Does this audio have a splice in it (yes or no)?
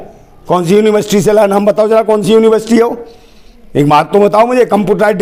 no